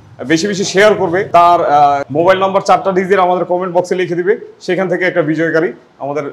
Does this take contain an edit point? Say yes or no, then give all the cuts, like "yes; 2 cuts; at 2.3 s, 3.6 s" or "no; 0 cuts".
yes; 2 cuts; at 1.2 s, 2.1 s